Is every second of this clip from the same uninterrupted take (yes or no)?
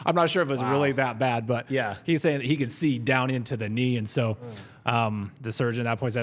yes